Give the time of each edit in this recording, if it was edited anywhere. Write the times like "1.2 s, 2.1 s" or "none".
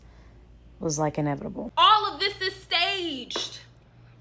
1.6 s